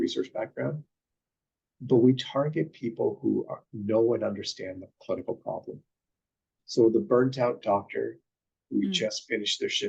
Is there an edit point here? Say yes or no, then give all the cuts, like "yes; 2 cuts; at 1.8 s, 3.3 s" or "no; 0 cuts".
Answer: no; 0 cuts